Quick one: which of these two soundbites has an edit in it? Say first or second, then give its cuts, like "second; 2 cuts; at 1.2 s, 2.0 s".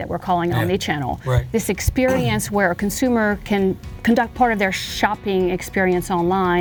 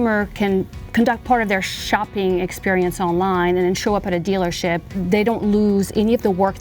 second; 1 cut; at 5.0 s